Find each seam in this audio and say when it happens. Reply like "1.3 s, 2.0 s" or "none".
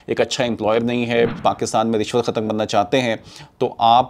1.3 s